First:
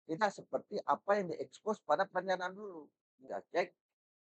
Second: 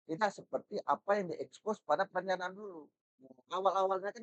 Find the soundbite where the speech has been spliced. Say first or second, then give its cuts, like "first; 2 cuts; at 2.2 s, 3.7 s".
first; 1 cut; at 3.3 s